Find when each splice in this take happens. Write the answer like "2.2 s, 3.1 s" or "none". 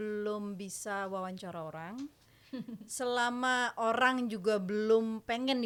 none